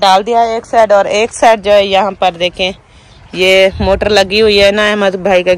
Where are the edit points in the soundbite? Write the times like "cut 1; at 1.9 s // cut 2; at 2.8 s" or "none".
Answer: none

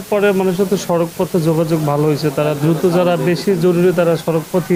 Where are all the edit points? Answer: none

